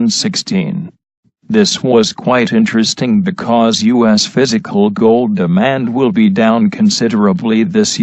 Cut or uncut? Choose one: cut